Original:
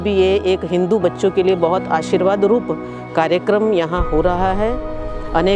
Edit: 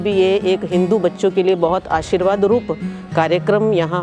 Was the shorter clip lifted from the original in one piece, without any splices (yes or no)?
yes